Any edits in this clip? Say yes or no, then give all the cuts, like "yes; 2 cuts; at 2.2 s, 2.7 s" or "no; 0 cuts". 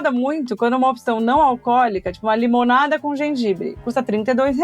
no; 0 cuts